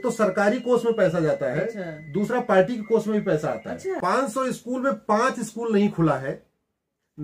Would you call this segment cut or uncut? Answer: cut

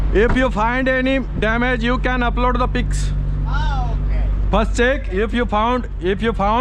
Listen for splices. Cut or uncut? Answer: uncut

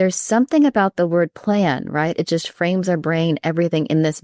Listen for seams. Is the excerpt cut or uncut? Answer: uncut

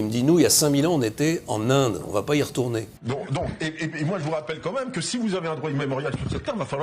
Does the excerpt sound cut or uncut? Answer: cut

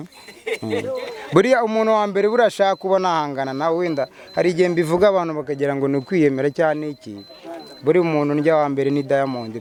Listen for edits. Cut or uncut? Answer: uncut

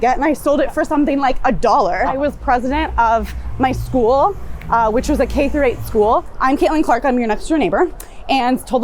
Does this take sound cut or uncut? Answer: cut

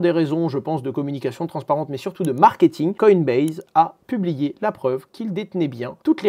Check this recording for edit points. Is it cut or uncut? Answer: uncut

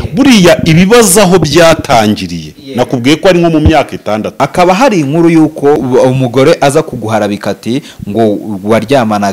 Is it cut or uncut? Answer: cut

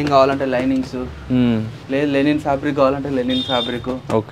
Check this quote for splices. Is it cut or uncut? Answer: uncut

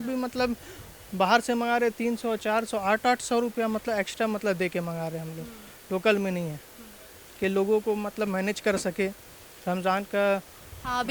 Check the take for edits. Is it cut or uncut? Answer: uncut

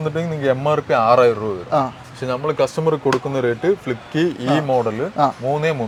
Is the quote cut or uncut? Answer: uncut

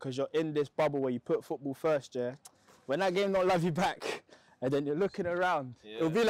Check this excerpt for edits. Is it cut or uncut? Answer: uncut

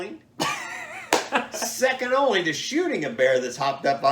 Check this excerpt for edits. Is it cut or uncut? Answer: uncut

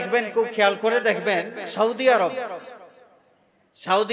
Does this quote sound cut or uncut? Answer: cut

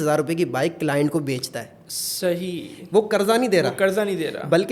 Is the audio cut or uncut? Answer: uncut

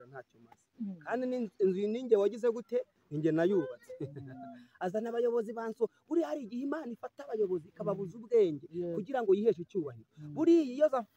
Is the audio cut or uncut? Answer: uncut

